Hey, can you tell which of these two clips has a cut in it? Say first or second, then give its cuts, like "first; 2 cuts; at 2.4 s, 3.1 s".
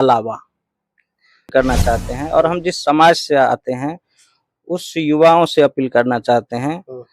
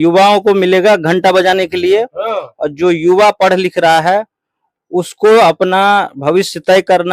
first; 1 cut; at 1.5 s